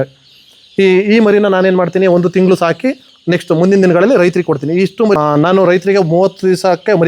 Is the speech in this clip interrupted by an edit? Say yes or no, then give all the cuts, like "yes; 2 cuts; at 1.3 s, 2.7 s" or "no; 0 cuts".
no; 0 cuts